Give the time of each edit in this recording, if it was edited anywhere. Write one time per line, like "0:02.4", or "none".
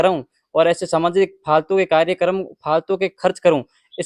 none